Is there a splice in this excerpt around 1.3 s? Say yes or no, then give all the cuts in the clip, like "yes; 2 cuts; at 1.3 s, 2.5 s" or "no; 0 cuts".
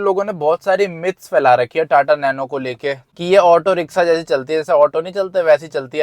no; 1 cut; at 3.1 s